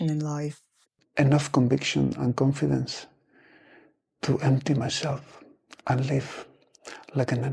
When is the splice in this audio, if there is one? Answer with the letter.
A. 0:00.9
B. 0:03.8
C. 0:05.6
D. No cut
A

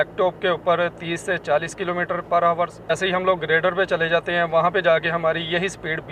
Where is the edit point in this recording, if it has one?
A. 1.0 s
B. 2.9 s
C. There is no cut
B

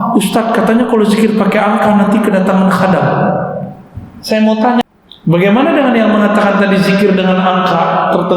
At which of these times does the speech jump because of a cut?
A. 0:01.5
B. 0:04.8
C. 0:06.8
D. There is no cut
B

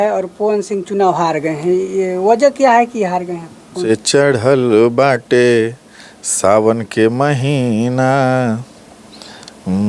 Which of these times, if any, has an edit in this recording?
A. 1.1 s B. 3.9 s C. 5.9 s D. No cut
B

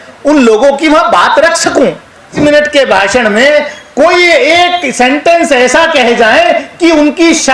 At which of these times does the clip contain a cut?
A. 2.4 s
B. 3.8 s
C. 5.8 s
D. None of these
A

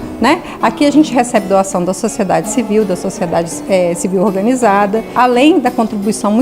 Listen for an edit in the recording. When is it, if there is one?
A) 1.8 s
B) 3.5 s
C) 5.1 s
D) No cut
C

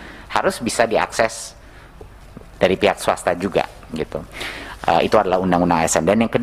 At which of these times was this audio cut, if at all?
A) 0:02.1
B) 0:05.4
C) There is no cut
C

